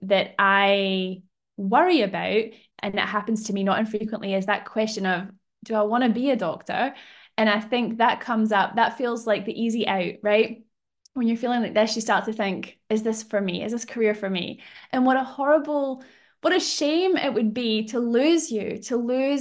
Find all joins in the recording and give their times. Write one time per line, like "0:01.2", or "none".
0:02.6